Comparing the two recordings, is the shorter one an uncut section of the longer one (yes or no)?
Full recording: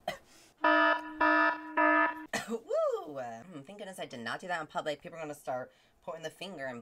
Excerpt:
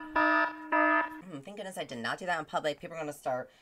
no